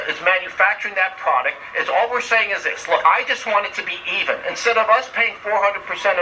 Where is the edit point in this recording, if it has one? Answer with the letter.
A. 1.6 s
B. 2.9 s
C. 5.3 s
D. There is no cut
D